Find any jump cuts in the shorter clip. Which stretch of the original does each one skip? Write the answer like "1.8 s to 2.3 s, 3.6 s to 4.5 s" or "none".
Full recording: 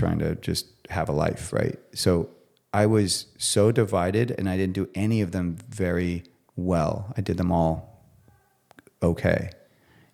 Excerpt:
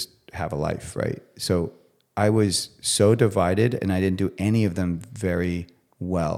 none